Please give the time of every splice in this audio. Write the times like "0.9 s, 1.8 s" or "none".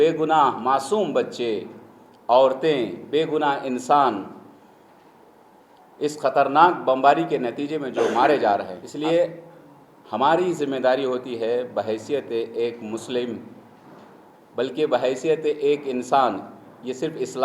8.8 s